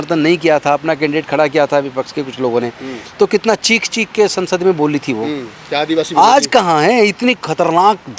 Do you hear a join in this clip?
no; 0 cuts

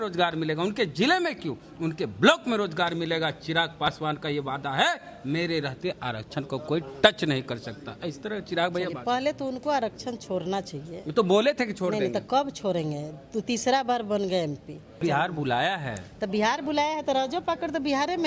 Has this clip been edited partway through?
yes; 1 cut; at 15.0 s

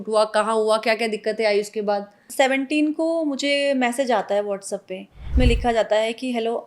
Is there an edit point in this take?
yes; 2 cuts; at 2.2 s, 5.3 s

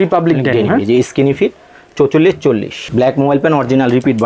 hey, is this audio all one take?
no; 1 cut; at 2.8 s

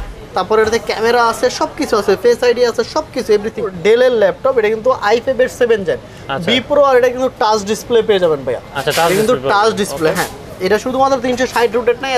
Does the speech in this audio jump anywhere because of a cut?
yes; 1 cut; at 3.7 s

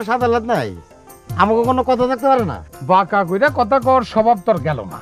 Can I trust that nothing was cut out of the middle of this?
yes; 0 cuts

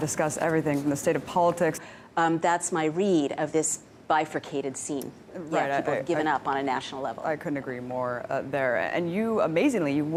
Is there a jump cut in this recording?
no; 0 cuts

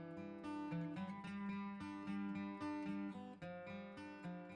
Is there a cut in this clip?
no; 0 cuts

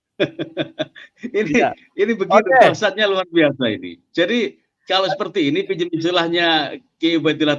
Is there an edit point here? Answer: no; 0 cuts

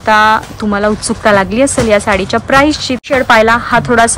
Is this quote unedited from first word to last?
no; 1 cut; at 3.0 s

